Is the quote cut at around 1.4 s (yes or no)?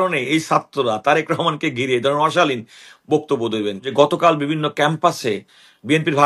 no